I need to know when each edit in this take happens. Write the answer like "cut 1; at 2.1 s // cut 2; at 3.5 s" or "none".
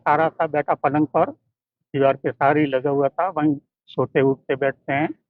none